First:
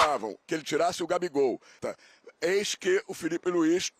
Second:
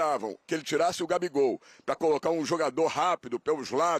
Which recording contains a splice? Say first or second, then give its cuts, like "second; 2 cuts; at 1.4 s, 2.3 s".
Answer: first; 1 cut; at 1.8 s